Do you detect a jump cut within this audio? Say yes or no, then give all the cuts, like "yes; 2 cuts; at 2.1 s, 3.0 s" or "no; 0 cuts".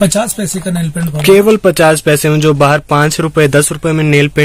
no; 0 cuts